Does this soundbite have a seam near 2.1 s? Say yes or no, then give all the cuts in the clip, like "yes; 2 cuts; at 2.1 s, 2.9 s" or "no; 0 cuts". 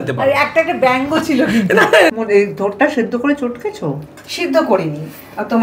yes; 1 cut; at 2.1 s